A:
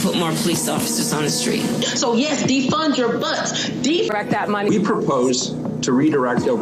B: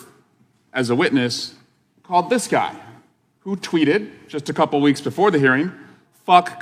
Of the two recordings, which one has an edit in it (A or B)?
A